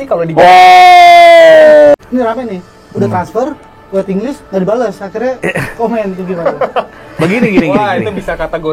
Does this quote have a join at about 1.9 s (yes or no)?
yes